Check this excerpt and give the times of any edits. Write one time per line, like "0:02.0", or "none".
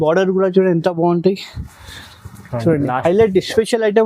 0:03.0